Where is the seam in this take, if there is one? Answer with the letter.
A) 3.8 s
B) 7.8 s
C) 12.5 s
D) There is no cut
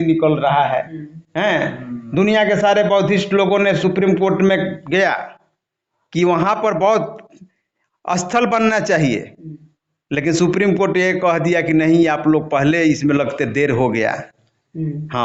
D